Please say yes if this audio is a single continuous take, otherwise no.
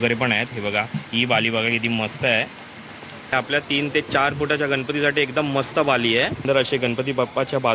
no